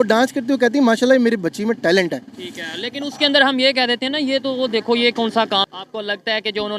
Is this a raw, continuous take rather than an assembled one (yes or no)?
no